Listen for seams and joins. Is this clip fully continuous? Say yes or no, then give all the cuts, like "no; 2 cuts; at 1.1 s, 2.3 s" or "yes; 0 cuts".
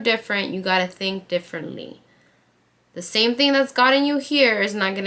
yes; 0 cuts